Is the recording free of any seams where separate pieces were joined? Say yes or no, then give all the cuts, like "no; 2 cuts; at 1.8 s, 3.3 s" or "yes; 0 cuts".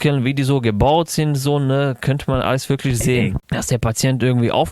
no; 1 cut; at 3.4 s